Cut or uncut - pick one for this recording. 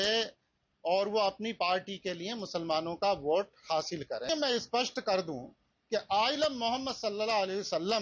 cut